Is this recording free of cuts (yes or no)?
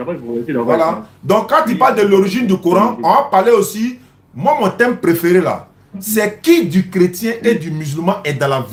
yes